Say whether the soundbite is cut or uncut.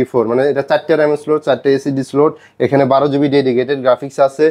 uncut